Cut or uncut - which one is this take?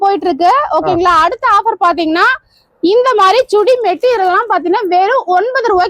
uncut